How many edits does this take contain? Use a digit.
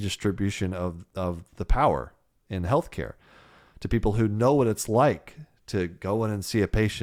0